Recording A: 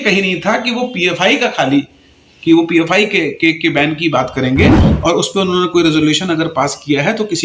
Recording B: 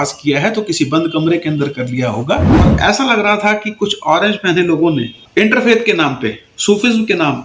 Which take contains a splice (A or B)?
B